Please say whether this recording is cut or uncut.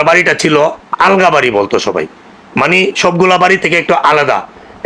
uncut